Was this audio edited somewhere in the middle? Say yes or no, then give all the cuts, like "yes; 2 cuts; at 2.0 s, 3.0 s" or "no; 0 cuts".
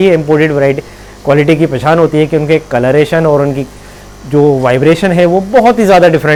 no; 0 cuts